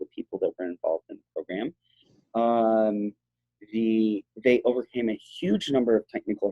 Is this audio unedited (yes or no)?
yes